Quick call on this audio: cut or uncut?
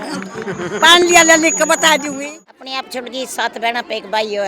cut